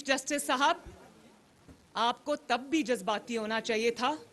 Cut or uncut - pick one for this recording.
uncut